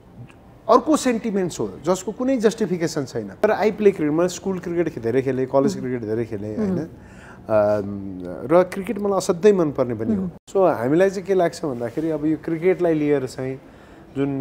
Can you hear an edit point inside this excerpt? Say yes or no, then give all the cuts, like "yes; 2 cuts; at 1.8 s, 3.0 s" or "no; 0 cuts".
yes; 2 cuts; at 3.4 s, 10.4 s